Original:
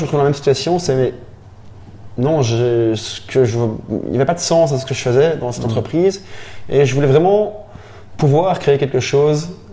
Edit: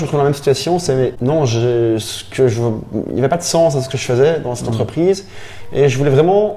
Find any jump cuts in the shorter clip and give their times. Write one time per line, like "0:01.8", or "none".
0:01.2